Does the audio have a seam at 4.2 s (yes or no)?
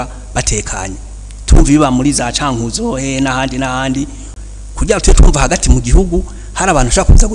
yes